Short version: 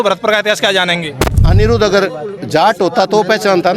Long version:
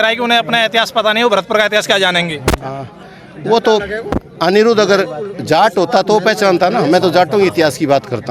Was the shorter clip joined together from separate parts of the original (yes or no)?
yes